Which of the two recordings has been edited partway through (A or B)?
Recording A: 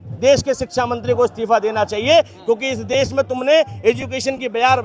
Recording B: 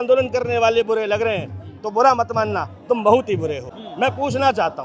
B